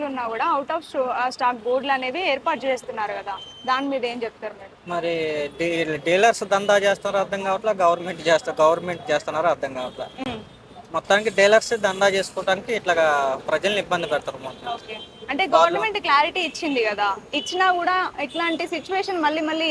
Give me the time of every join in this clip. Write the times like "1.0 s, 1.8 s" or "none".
none